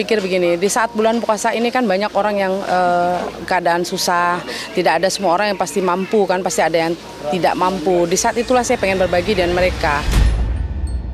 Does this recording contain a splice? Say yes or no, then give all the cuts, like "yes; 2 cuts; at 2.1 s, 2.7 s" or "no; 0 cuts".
yes; 1 cut; at 10.1 s